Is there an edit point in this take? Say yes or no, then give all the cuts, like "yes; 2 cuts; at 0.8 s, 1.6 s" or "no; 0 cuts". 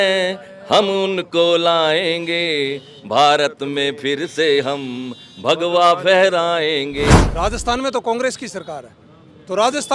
yes; 1 cut; at 7.1 s